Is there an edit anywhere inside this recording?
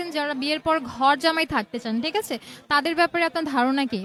no; 0 cuts

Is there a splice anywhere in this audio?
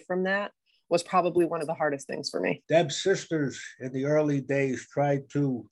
yes; 1 cut; at 2.6 s

